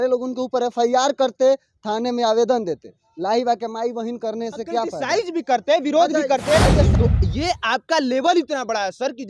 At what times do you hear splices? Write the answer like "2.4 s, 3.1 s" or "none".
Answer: 6.9 s